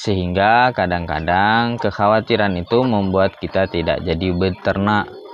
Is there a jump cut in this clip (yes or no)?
no